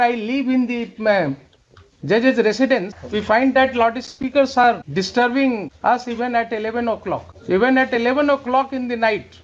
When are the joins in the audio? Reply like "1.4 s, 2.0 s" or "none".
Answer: 3.0 s, 4.8 s, 5.7 s, 7.3 s